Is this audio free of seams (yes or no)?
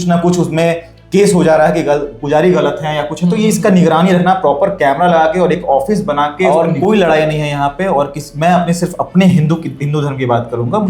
no